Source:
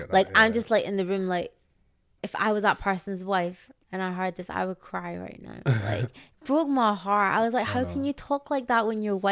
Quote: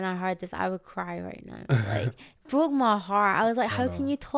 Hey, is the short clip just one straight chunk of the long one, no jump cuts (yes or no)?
yes